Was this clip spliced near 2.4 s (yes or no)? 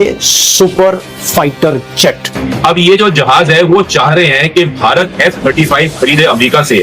yes